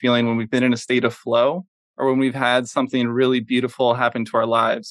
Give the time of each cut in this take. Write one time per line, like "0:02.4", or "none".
none